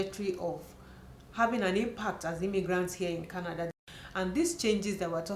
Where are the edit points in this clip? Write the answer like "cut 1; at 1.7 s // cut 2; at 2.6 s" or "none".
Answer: cut 1; at 3.7 s